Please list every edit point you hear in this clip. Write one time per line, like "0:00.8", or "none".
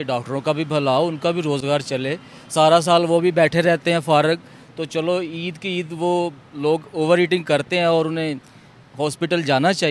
none